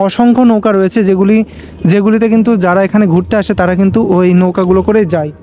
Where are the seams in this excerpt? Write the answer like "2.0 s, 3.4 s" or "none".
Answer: none